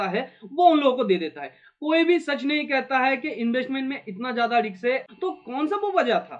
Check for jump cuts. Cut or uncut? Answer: cut